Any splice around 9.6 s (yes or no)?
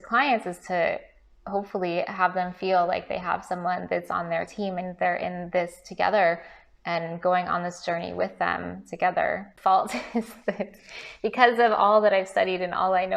yes